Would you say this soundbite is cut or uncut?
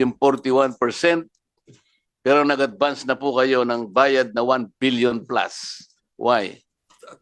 uncut